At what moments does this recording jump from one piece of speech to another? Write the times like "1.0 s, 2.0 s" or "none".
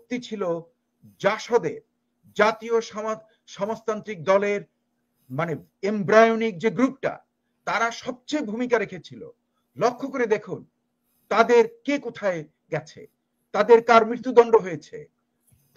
none